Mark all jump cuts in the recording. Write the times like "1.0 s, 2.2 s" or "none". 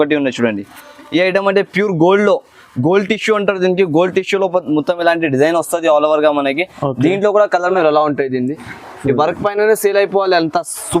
7.7 s